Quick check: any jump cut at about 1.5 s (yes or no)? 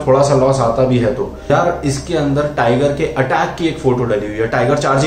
yes